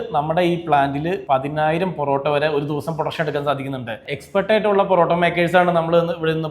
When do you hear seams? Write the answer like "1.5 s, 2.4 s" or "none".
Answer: 1.2 s, 4.0 s